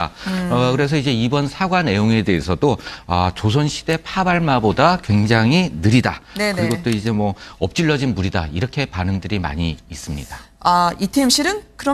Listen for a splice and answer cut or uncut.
uncut